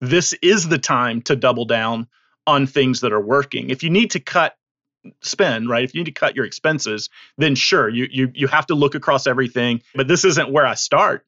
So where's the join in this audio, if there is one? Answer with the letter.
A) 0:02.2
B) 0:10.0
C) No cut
B